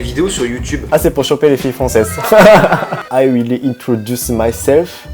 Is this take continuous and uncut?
no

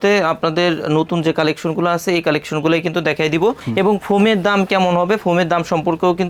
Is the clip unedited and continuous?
yes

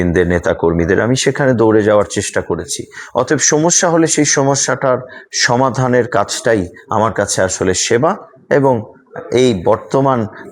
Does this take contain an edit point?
no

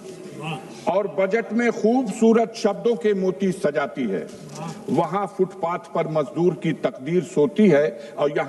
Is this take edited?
no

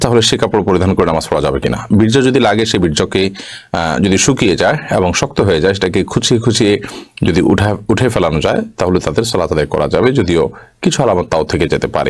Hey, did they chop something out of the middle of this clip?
no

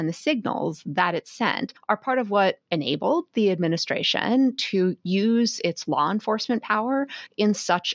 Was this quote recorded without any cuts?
yes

